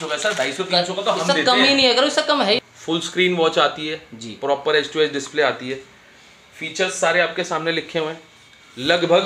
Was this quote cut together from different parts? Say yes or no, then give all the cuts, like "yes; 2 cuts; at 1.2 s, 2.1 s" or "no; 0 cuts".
yes; 1 cut; at 2.6 s